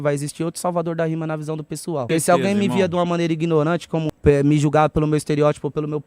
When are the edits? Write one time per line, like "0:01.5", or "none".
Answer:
0:02.0
0:04.1